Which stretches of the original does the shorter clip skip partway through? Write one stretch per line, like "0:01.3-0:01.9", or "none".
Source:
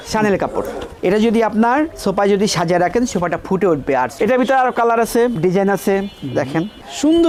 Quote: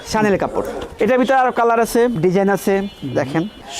0:00.9-0:04.1